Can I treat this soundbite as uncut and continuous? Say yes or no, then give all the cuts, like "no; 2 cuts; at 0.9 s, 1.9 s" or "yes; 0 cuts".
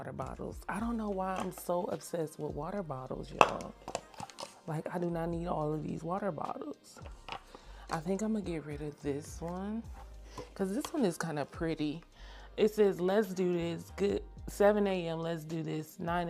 yes; 0 cuts